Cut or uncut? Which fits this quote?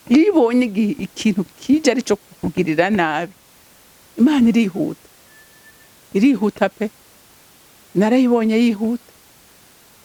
uncut